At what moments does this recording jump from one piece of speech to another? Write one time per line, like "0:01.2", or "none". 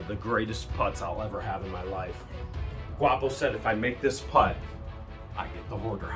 none